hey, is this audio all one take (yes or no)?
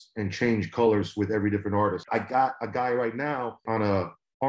no